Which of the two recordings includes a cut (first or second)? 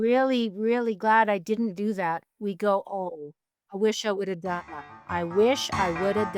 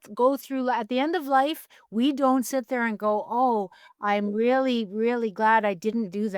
first